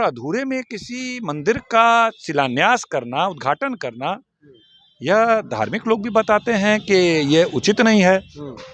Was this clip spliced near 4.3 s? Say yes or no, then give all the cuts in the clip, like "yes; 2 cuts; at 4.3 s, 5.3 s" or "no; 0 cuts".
no; 0 cuts